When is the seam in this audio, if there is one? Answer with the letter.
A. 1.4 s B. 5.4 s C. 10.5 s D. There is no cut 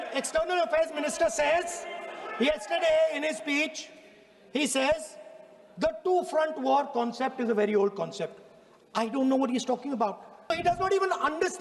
C